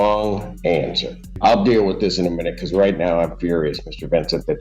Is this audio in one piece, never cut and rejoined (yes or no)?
no